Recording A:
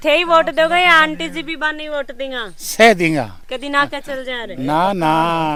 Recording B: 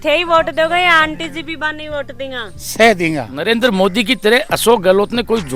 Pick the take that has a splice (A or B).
B